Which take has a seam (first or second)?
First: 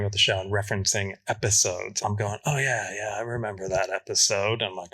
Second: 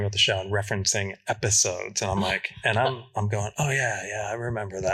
first